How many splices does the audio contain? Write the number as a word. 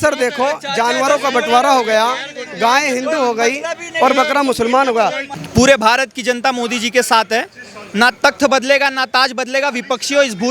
one